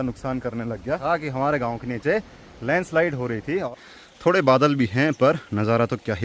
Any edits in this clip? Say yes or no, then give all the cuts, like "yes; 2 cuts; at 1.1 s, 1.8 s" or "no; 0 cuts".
yes; 2 cuts; at 1.0 s, 3.7 s